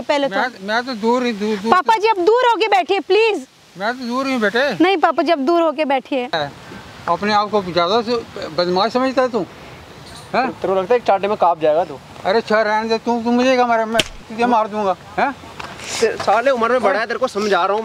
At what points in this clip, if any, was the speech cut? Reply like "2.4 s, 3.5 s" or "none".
6.4 s